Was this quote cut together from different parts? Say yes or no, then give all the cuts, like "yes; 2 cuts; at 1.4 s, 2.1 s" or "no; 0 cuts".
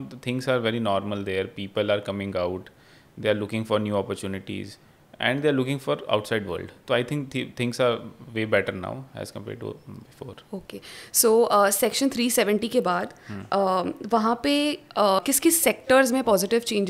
no; 0 cuts